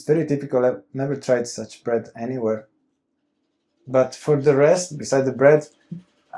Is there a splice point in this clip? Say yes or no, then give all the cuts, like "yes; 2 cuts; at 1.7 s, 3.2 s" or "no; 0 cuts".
no; 0 cuts